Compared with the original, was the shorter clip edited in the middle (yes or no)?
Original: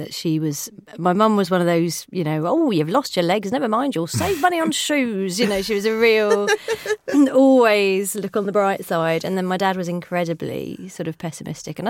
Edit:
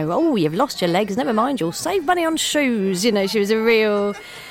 no